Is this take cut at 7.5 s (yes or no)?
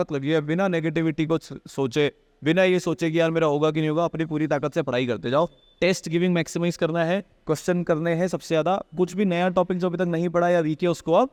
no